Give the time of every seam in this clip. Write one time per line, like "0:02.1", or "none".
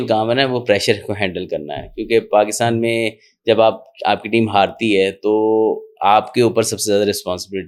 none